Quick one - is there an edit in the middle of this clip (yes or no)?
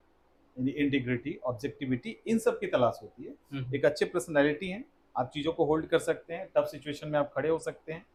no